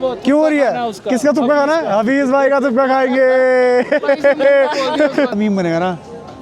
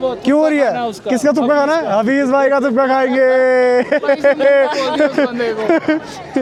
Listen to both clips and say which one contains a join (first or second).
first